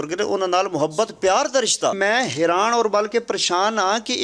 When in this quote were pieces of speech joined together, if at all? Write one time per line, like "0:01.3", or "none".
0:02.0